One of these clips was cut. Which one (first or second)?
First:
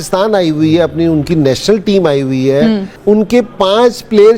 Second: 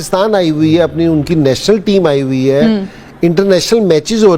first